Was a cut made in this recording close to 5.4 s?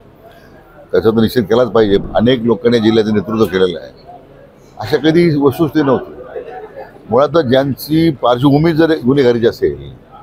no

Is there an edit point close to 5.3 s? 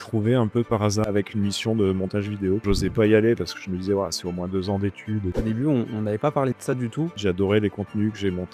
yes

